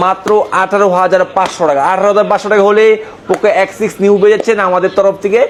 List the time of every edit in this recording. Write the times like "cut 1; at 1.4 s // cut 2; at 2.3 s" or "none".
none